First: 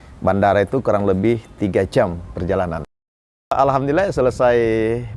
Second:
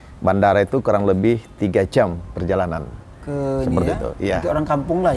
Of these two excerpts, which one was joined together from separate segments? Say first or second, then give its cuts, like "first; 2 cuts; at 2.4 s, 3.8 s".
first; 1 cut; at 3.5 s